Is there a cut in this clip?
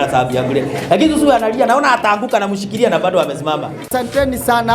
yes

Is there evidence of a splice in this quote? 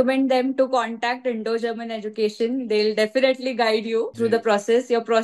yes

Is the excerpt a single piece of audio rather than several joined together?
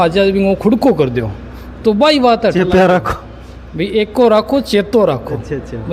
yes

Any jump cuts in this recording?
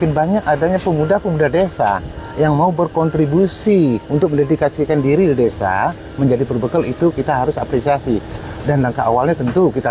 no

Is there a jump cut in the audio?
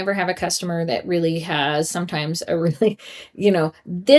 no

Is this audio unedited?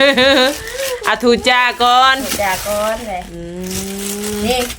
yes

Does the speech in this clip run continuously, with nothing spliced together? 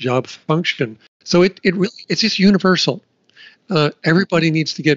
no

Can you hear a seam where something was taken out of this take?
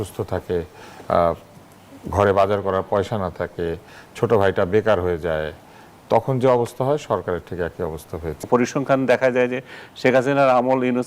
yes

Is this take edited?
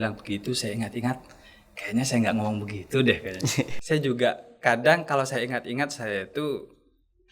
yes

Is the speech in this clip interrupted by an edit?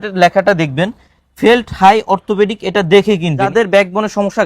yes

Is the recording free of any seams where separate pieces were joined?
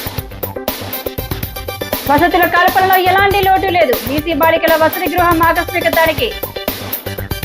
yes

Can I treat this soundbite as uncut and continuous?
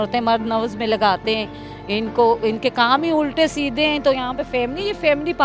yes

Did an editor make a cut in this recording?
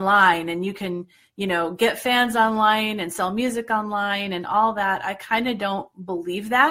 no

